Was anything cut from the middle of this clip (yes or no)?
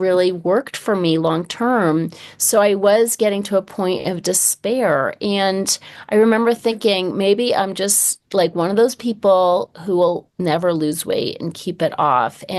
no